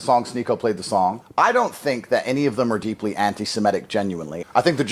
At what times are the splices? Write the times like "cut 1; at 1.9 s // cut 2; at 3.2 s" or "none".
none